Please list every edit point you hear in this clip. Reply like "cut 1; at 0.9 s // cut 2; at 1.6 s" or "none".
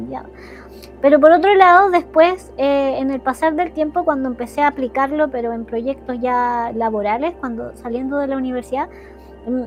none